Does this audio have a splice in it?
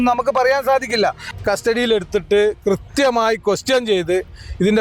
yes; 1 cut; at 1.2 s

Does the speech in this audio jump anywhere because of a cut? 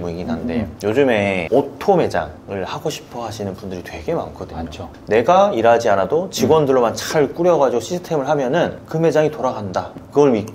no; 0 cuts

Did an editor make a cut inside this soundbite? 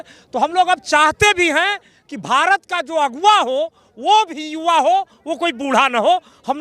no; 0 cuts

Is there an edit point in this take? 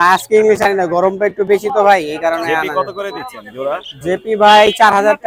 no; 0 cuts

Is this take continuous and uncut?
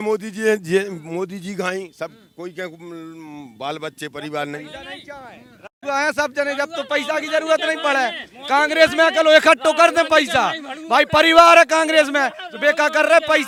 yes; 0 cuts

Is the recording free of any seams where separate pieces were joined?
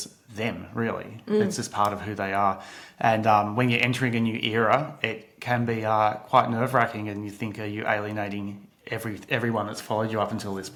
yes; 0 cuts

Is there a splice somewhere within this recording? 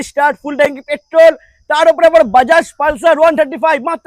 no; 0 cuts

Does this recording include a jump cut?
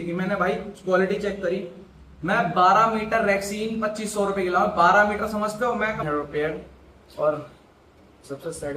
yes; 1 cut; at 6.0 s

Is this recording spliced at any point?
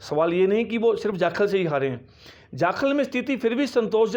no; 0 cuts

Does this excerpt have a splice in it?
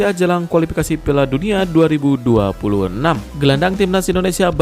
yes; 1 cut; at 3.3 s

